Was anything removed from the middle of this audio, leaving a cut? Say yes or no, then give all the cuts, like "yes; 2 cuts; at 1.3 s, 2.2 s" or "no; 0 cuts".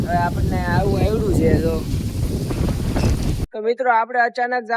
yes; 1 cut; at 3.4 s